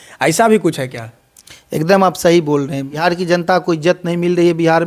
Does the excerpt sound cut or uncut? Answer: cut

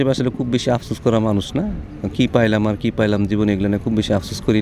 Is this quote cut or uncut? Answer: uncut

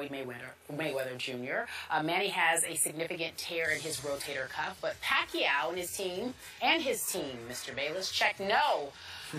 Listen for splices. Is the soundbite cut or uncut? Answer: cut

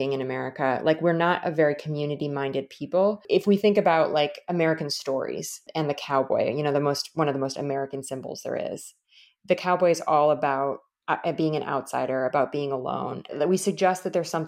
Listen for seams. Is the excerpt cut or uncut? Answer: cut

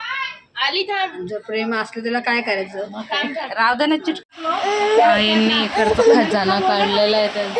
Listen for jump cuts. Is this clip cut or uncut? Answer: cut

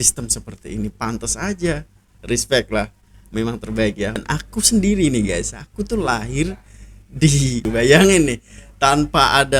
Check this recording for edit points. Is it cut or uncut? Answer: cut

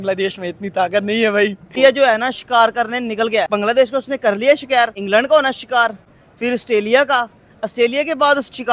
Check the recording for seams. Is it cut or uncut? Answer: cut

